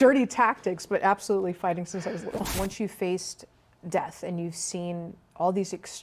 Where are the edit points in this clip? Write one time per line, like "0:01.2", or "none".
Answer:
0:02.6